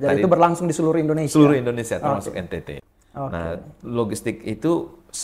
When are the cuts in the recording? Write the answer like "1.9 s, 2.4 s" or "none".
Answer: 2.8 s